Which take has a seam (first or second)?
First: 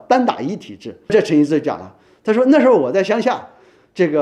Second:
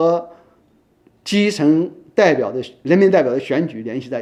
first